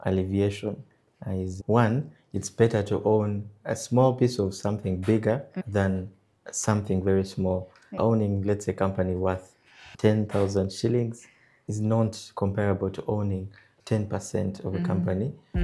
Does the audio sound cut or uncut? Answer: uncut